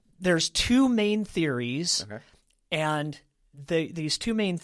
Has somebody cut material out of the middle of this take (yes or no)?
no